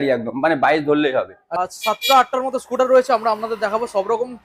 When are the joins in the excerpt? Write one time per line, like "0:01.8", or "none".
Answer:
0:01.4